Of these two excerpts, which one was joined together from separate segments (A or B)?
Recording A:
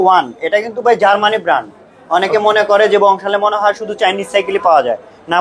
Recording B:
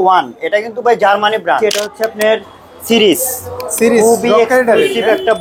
B